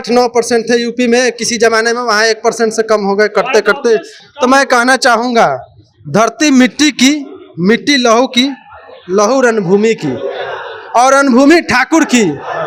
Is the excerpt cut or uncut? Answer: uncut